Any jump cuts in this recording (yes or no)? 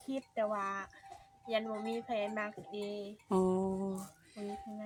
no